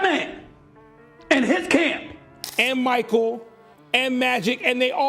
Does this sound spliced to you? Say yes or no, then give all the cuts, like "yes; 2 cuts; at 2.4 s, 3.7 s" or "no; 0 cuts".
yes; 1 cut; at 2.4 s